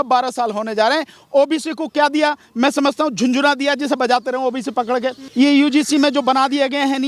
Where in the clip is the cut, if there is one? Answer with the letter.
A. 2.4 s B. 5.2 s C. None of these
B